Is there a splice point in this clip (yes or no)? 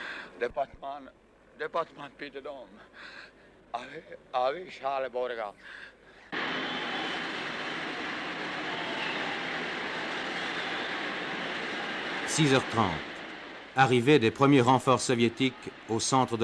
yes